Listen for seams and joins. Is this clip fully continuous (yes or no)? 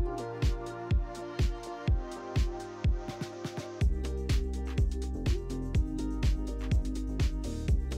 yes